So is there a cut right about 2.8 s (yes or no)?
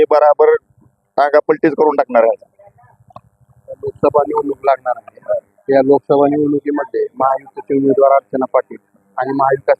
no